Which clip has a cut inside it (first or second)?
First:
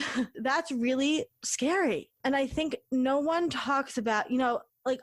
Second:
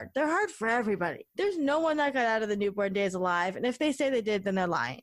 first